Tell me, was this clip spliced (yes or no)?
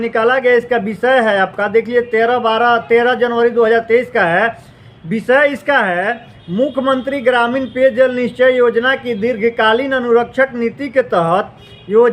no